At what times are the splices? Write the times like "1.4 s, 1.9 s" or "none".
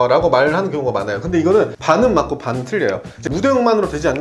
1.2 s, 3.1 s